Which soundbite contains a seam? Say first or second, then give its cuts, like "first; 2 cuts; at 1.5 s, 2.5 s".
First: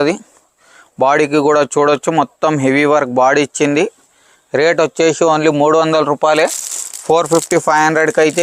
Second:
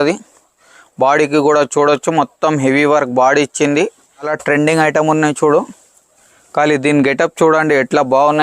second; 1 cut; at 4.4 s